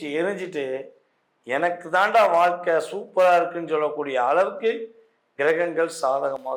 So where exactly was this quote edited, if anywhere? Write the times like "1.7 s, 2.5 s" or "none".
none